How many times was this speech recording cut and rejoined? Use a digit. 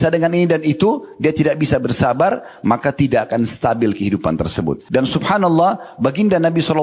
1